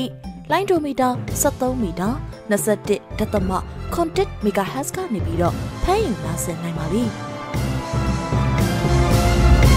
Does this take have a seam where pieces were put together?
yes; 1 cut; at 7.2 s

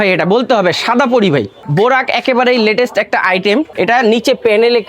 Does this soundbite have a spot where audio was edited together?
yes; 2 cuts; at 1.7 s, 3.7 s

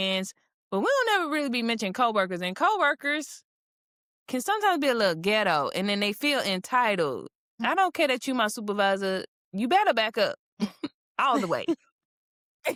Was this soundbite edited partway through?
no; 0 cuts

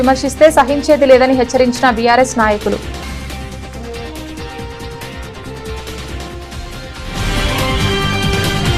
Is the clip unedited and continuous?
no; 1 cut; at 3.1 s

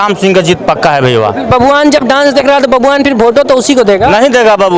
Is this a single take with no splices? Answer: yes; 0 cuts

